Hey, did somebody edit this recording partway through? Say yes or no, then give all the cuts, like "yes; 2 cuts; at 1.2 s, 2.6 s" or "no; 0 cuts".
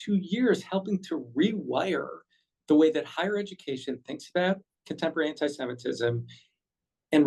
no; 0 cuts